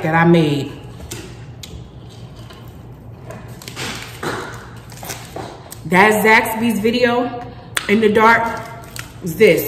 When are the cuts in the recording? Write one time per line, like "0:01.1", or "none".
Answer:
none